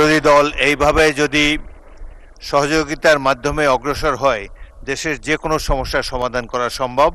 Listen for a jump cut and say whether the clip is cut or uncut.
uncut